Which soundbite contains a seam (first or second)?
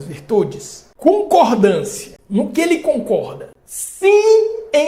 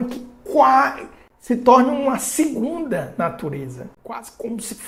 first